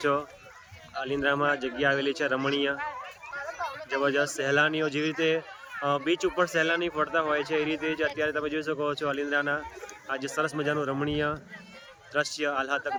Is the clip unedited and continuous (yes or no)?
yes